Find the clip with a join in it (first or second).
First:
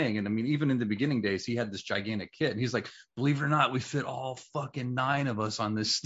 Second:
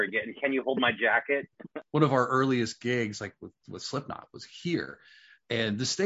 second